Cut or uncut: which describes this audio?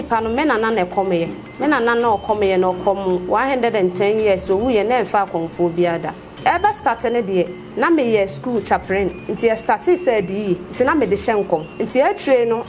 cut